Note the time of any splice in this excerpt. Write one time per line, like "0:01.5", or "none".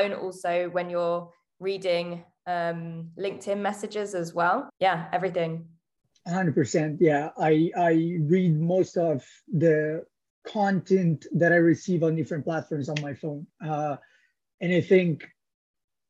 0:04.7

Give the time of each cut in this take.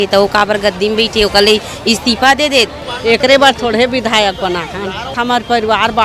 0:02.8
0:05.1

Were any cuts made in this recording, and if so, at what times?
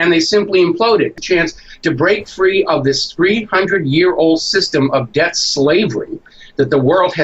0:01.1

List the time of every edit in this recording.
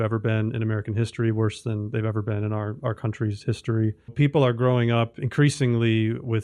0:04.1

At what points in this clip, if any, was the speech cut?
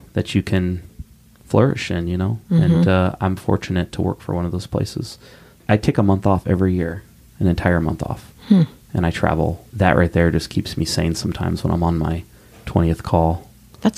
0:09.6

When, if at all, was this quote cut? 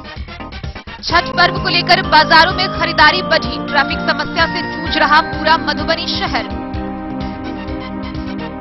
0:01.0

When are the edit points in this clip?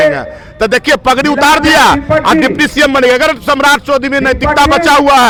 none

